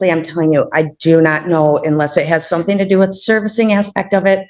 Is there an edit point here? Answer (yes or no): no